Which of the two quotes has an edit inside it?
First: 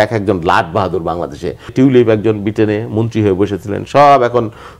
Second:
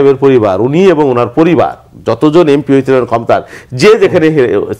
first; 1 cut; at 1.7 s

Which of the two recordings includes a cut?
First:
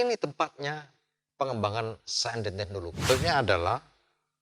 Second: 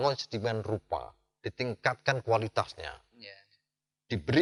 first; 1 cut; at 3.0 s

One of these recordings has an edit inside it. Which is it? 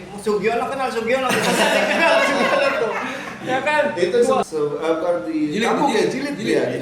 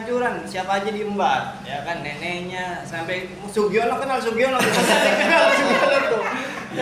first; 1 cut; at 4.5 s

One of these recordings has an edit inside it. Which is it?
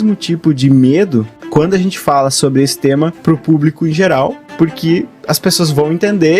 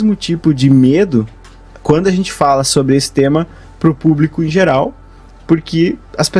first; 3 cuts; at 1.4 s, 3.2 s, 4.4 s

